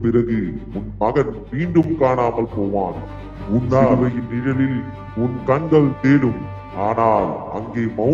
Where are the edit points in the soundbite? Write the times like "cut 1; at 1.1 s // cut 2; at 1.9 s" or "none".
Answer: cut 1; at 3.9 s